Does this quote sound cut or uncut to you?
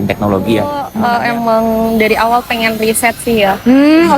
cut